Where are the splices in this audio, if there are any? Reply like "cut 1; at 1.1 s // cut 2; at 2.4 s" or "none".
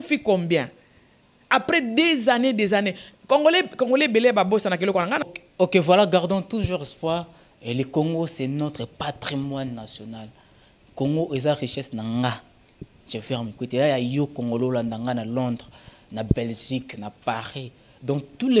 cut 1; at 5.3 s